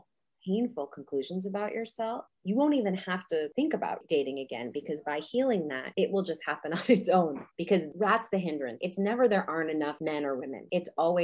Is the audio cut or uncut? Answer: cut